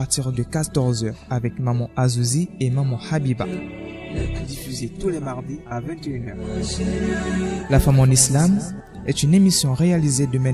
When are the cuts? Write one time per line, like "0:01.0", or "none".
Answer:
none